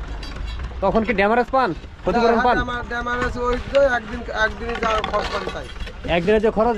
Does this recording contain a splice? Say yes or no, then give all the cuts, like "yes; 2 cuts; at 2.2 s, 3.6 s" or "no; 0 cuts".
no; 0 cuts